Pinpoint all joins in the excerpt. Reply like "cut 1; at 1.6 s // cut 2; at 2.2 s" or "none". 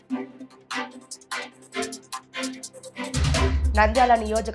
none

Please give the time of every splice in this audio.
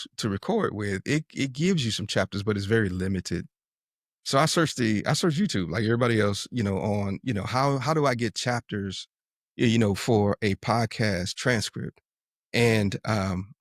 none

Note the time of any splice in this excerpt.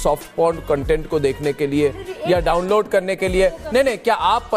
none

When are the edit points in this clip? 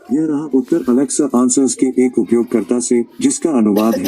cut 1; at 0.9 s

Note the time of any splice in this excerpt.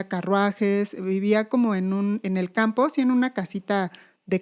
none

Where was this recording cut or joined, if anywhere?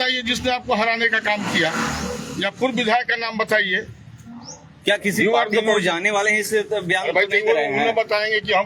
none

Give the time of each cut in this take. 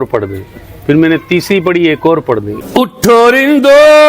cut 1; at 2.5 s

